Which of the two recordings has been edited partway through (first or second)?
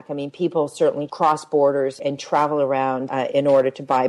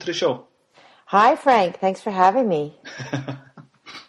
first